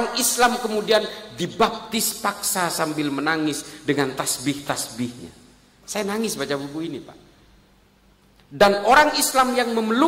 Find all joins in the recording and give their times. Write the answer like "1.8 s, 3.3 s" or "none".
none